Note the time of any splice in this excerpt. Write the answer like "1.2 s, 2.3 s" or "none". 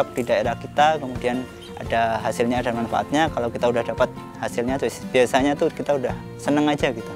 6.3 s